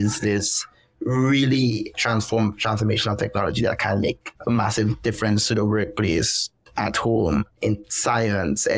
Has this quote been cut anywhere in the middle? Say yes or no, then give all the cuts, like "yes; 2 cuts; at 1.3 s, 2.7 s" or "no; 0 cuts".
no; 0 cuts